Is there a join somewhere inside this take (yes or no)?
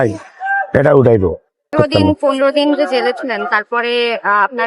yes